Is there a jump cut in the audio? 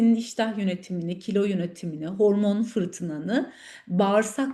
no; 0 cuts

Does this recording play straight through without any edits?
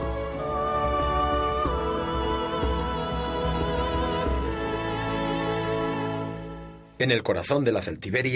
yes; 0 cuts

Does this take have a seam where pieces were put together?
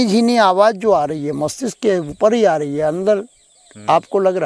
no; 0 cuts

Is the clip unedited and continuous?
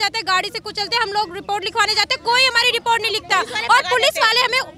yes; 0 cuts

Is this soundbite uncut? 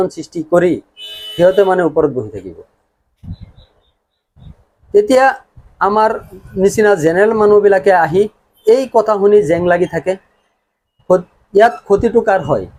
yes; 0 cuts

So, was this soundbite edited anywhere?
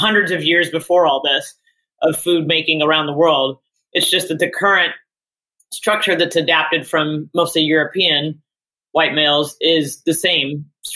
no; 0 cuts

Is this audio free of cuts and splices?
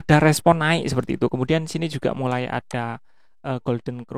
yes; 0 cuts

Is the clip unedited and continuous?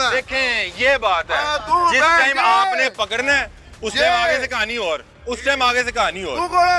yes; 0 cuts

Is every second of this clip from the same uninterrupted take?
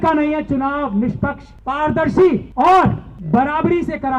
no; 3 cuts; at 1.5 s, 2.5 s, 3.1 s

